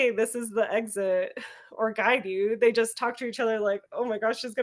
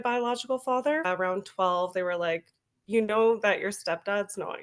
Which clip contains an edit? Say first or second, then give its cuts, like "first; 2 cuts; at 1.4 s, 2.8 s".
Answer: second; 1 cut; at 1.1 s